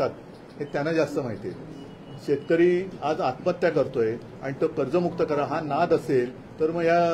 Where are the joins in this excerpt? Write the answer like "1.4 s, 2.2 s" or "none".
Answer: none